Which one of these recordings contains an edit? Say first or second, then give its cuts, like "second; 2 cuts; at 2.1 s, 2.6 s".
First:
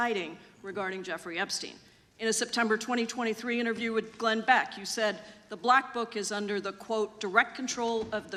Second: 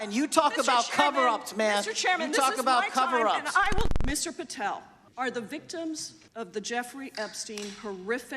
second; 2 cuts; at 3.9 s, 6.2 s